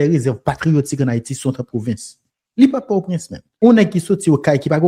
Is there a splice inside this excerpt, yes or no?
yes